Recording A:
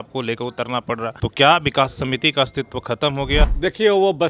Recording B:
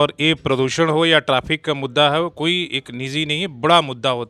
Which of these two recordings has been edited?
A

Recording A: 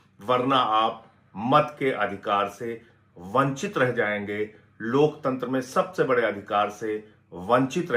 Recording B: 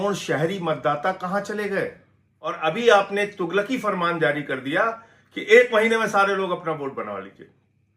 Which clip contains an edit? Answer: B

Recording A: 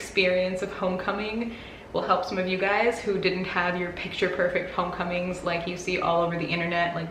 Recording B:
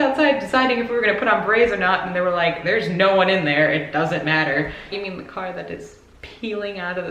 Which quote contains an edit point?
B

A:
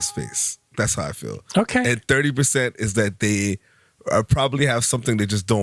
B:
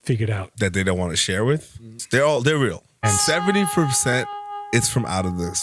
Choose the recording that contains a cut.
B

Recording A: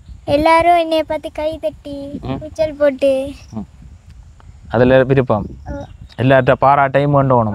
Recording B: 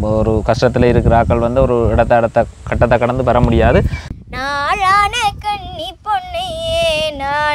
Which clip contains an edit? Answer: B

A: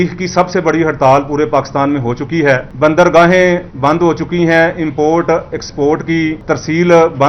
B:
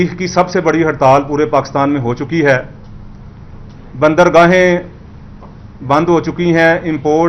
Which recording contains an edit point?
A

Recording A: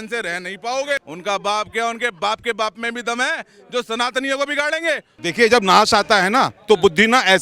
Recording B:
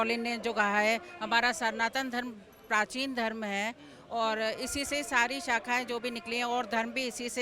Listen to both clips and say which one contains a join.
A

